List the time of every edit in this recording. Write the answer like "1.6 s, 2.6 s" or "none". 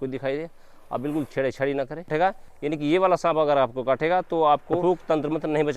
2.1 s, 4.8 s